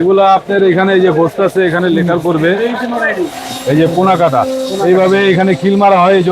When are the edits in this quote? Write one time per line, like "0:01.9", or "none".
0:03.4

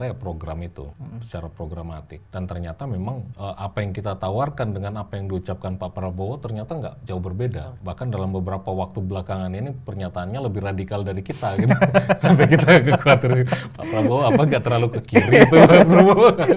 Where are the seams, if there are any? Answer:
0:01.0
0:02.2
0:03.3
0:07.7

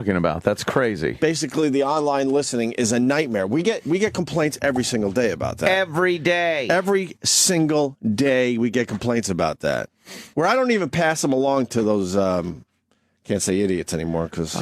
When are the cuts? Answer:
0:06.8

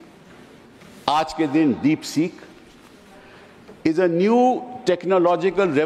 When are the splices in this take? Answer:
none

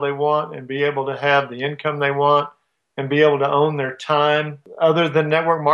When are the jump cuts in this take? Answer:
0:04.6

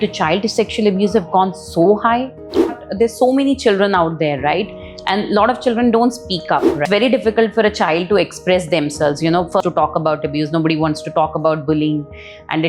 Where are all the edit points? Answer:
0:02.7
0:06.7
0:09.6

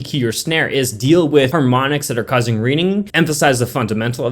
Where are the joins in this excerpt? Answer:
0:01.5

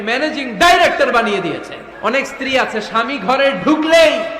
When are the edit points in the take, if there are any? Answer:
0:01.8

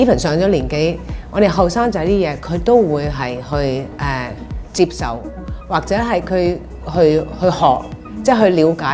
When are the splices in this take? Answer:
none

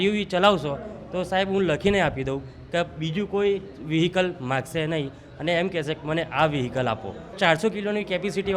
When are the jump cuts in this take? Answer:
none

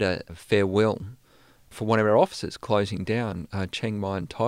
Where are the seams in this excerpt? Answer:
0:01.7

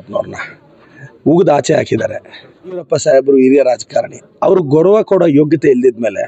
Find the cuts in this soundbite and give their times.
0:02.9

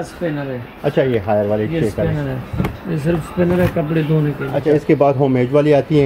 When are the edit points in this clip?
0:04.6

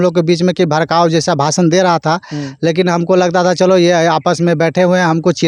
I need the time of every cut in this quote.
none

